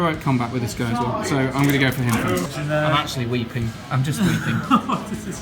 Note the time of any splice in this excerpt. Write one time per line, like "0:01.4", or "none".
0:02.5